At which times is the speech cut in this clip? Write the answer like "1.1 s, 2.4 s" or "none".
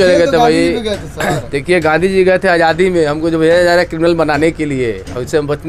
none